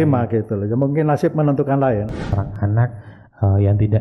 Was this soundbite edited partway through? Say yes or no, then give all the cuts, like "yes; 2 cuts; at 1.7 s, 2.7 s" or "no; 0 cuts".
yes; 1 cut; at 2.3 s